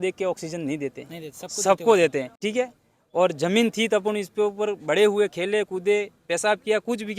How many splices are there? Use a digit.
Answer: 1